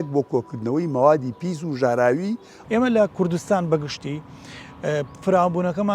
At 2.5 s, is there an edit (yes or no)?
yes